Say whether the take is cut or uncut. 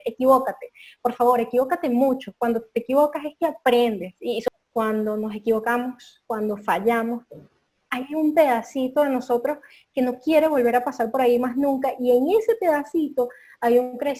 cut